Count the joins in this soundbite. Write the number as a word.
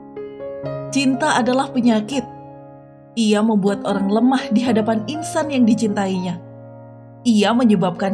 one